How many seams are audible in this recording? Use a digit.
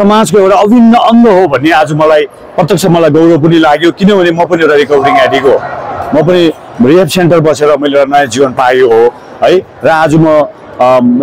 0